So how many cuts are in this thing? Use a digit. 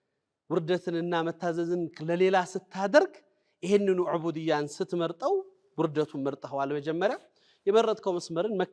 0